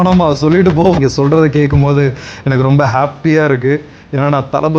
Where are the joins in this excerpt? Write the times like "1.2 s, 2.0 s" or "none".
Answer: 1.0 s